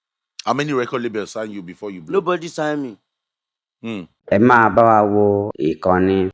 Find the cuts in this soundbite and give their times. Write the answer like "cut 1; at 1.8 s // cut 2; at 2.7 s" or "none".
cut 1; at 4.1 s